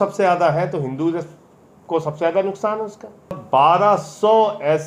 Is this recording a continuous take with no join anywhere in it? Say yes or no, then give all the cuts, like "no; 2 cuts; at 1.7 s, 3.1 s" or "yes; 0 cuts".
no; 1 cut; at 3.4 s